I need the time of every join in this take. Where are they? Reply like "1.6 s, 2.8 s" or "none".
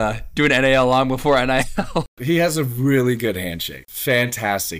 2.1 s, 3.9 s